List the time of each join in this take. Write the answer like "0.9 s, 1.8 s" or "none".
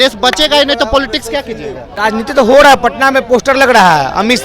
1.8 s